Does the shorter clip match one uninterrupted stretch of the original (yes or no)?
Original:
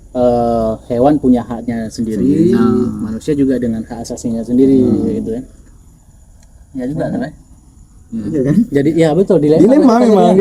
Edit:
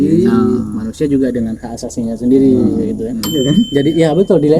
no